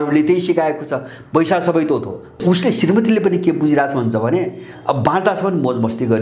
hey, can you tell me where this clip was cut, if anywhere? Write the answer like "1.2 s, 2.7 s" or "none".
2.3 s